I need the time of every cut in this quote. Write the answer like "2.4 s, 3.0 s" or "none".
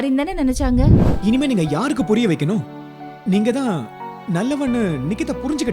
1.0 s